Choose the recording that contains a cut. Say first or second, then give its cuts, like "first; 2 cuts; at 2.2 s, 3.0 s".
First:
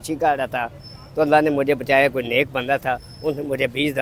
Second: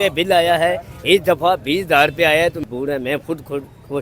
second; 1 cut; at 2.6 s